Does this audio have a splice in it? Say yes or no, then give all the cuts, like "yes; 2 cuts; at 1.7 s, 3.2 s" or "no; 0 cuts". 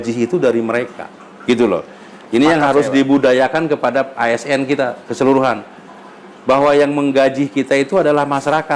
no; 0 cuts